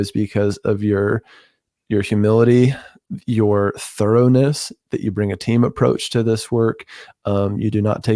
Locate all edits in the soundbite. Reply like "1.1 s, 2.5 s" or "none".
none